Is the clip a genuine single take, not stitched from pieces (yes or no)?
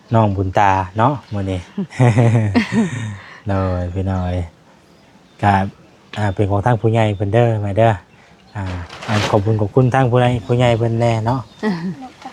yes